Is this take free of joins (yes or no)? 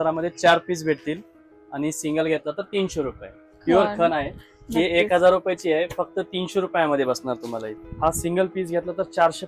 no